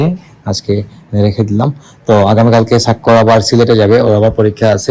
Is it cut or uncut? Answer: uncut